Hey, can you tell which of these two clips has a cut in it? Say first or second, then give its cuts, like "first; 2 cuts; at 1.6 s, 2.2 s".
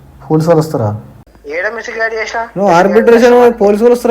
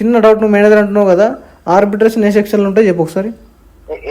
first; 1 cut; at 1.3 s